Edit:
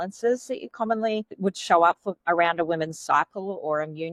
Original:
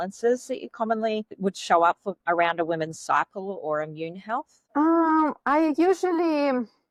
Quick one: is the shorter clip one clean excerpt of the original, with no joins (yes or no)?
yes